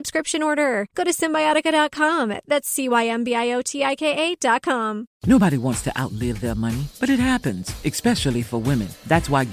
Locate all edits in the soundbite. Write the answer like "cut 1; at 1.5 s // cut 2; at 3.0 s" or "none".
cut 1; at 5.1 s